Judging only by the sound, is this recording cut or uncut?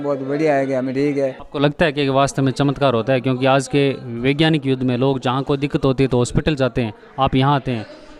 cut